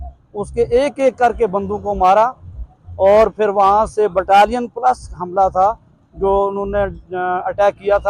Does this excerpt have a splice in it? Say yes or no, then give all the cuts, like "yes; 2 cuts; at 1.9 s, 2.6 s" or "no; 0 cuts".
no; 0 cuts